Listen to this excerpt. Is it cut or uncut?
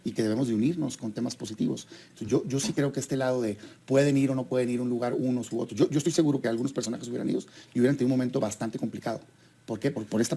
uncut